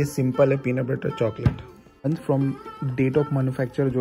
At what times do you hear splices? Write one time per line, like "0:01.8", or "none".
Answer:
0:02.0